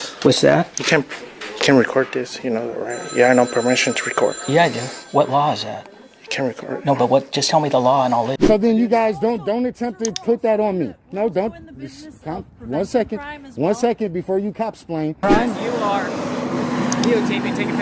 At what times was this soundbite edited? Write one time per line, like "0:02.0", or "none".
0:08.4
0:15.2